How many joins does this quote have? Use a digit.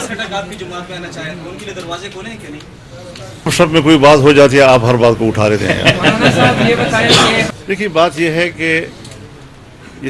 2